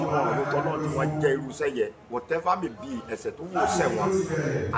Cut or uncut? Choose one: uncut